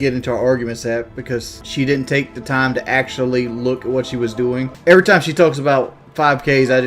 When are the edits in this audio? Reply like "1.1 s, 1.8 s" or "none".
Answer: 1.6 s, 4.7 s